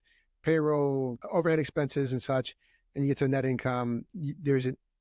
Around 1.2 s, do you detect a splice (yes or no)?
yes